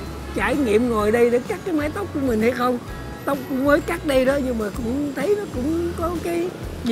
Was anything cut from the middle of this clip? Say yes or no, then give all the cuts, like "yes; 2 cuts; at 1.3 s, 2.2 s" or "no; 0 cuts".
no; 0 cuts